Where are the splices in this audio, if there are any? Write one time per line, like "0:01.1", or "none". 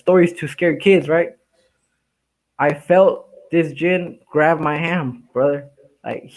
none